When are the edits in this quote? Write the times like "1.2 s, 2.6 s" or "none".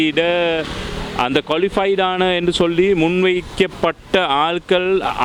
none